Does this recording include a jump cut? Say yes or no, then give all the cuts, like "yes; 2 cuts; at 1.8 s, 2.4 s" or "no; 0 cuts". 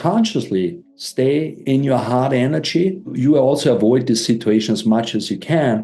yes; 2 cuts; at 1.0 s, 3.1 s